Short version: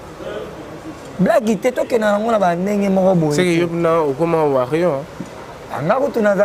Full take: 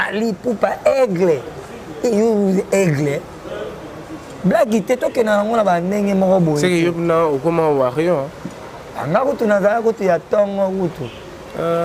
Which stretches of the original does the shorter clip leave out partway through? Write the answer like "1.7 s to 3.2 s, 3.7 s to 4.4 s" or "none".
none